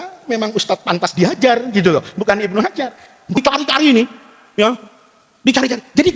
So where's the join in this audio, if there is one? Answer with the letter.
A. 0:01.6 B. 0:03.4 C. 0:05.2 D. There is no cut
B